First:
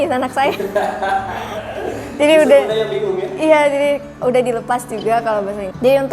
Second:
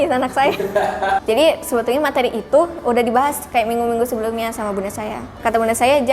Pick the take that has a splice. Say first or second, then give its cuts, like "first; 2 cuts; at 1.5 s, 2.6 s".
second; 2 cuts; at 1.2 s, 5.4 s